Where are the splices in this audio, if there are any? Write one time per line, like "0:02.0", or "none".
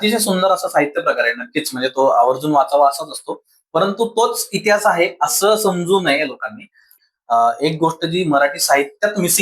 0:06.9